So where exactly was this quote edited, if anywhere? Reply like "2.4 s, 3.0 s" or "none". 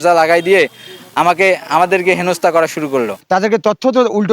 3.2 s